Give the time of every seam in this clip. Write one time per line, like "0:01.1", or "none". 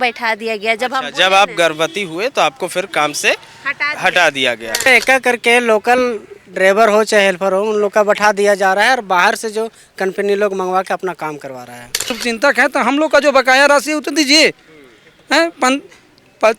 0:04.9
0:12.1

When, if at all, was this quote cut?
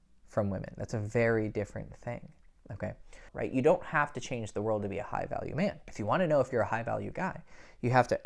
0:03.3
0:05.9

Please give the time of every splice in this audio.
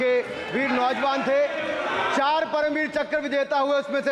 none

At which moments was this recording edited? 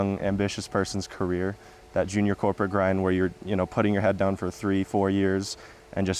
none

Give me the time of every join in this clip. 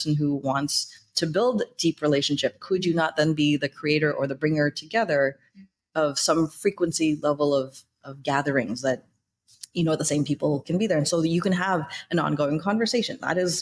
none

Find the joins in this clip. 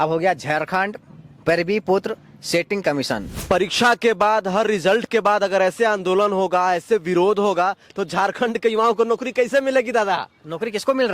0:03.3

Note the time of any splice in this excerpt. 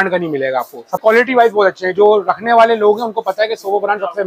0:01.0

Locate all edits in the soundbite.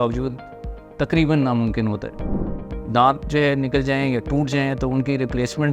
0:02.6

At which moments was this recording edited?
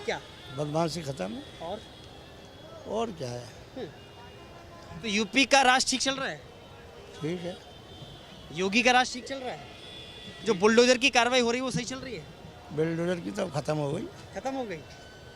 none

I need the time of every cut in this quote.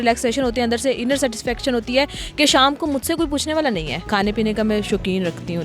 0:04.0

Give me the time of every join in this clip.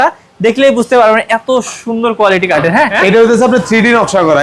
0:02.8

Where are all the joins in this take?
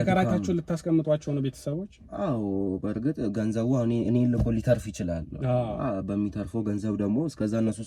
none

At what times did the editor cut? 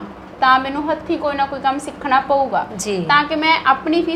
none

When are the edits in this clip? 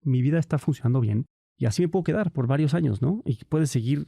0:00.9

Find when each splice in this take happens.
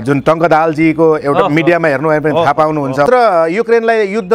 0:03.1

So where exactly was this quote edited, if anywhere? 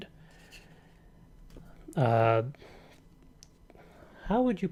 none

